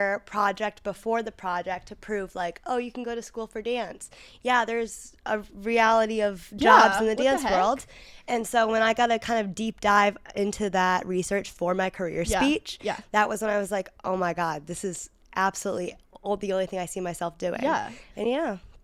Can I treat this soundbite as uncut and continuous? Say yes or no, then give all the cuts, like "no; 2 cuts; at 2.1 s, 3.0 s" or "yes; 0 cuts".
yes; 0 cuts